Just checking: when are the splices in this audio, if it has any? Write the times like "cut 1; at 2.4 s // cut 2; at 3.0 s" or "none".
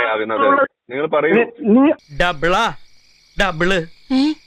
cut 1; at 2.1 s